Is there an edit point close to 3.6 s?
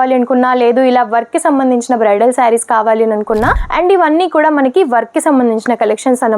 yes; 1 cut; at 3.6 s

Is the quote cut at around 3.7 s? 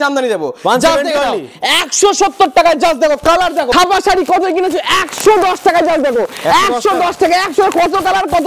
yes; 1 cut; at 3.7 s

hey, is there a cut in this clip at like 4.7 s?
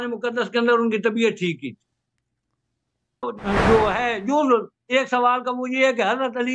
no; 1 cut; at 3.3 s

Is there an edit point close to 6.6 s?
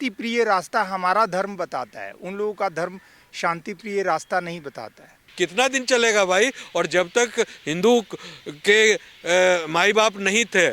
no; 1 cut; at 5.3 s

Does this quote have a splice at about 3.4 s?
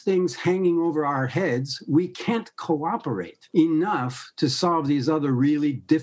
yes; 1 cut; at 3.4 s

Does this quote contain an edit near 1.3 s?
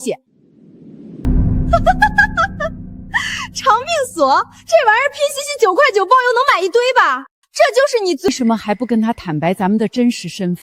yes; 2 cuts; at 1.3 s, 8.3 s

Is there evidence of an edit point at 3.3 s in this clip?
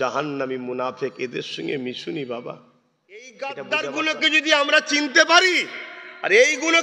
yes; 1 cut; at 3.3 s

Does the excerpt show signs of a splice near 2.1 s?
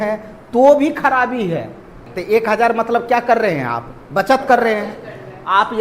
yes; 1 cut; at 2.1 s

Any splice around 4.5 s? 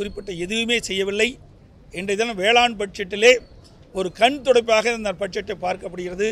no; 0 cuts

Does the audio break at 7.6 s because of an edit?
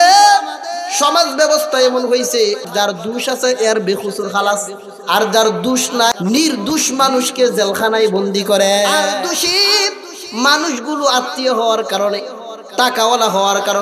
no; 3 cuts; at 2.7 s, 6.1 s, 9.1 s

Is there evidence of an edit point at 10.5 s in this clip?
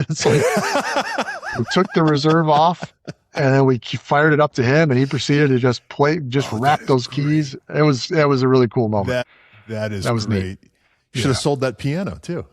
no; 1 cut; at 9.2 s

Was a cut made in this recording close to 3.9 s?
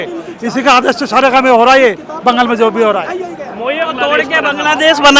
yes; 1 cut; at 3.9 s

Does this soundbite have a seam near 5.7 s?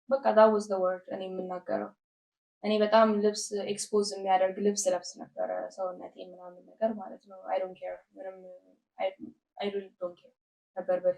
no; 0 cuts

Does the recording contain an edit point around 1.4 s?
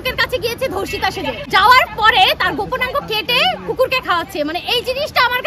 yes; 1 cut; at 1.4 s

